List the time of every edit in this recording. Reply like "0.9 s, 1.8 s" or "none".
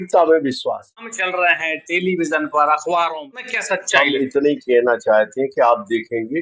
1.2 s, 3.5 s